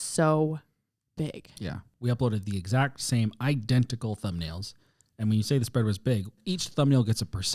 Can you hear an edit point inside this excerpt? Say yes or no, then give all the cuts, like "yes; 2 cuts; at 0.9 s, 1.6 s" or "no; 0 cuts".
yes; 2 cuts; at 1.8 s, 6.4 s